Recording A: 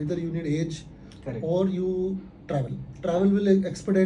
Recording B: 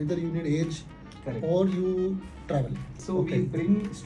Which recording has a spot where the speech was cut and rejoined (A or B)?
B